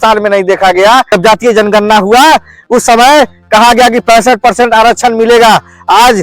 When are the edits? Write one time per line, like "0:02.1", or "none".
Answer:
0:01.1